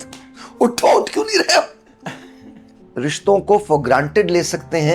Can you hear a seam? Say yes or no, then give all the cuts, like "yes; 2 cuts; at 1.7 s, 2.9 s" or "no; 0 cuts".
yes; 1 cut; at 2.8 s